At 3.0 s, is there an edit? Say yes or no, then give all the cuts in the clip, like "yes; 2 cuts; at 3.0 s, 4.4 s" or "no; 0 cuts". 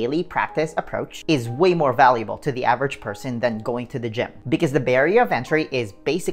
no; 2 cuts; at 1.1 s, 4.4 s